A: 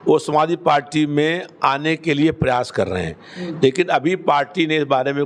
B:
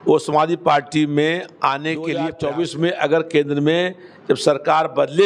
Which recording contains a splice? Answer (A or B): B